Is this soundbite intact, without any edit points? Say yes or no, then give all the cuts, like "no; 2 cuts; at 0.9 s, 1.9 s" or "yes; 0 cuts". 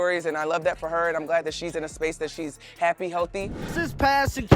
no; 1 cut; at 3.6 s